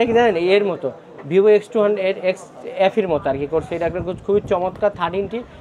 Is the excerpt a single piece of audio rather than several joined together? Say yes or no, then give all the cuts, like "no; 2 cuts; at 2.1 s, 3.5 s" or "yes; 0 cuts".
yes; 0 cuts